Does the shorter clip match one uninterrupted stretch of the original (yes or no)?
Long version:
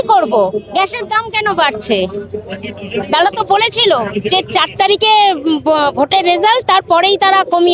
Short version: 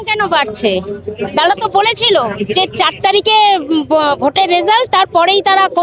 no